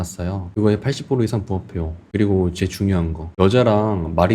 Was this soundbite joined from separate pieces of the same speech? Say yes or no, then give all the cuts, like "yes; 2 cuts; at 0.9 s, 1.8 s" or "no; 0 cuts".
yes; 2 cuts; at 2.0 s, 3.2 s